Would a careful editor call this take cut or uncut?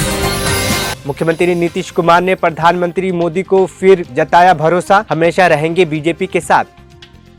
uncut